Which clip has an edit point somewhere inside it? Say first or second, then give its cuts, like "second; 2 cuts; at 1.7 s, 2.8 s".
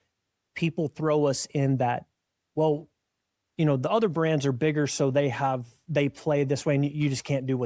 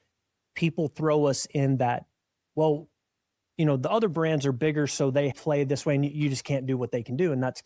second; 1 cut; at 5.3 s